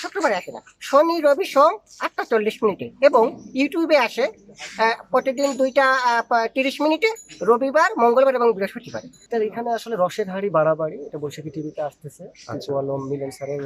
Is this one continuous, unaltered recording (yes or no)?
no